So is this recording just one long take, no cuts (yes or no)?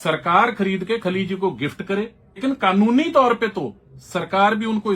no